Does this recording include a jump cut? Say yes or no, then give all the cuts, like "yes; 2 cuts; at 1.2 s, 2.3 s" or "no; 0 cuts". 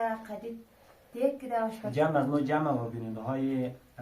yes; 1 cut; at 1.8 s